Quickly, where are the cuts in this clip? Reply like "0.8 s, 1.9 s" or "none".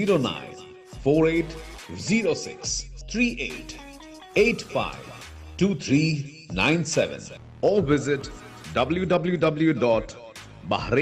none